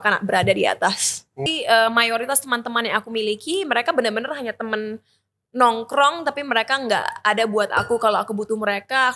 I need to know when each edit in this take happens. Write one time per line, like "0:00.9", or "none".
0:01.4